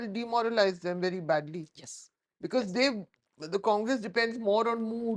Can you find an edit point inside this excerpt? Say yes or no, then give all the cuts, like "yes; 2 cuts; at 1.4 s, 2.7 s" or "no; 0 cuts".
no; 0 cuts